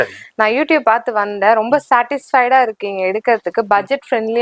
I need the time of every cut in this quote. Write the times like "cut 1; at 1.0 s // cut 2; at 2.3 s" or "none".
none